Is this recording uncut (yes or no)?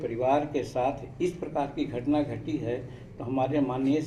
yes